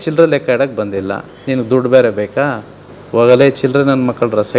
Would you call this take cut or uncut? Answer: uncut